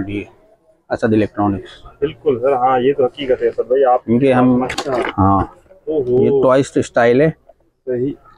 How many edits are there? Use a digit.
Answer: 1